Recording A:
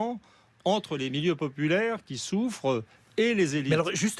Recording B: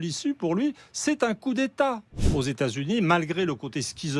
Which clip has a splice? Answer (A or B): B